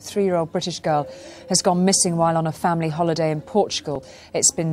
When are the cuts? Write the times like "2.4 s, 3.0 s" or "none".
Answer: none